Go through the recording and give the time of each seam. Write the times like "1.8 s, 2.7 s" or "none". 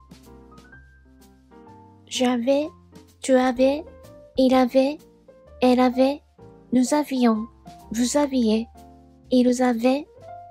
2.1 s

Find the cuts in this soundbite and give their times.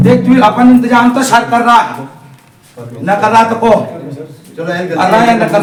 none

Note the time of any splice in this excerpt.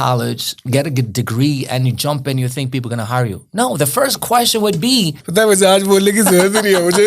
5.2 s

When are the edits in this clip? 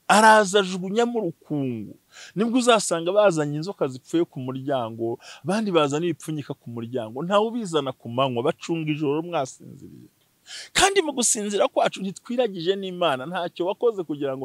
none

